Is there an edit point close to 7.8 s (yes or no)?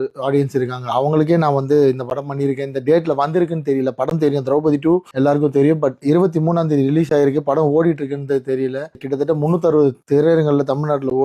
no